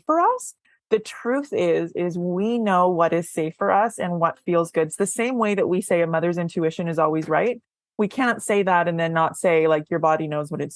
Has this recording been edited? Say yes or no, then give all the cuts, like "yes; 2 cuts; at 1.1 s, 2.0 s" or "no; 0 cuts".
no; 0 cuts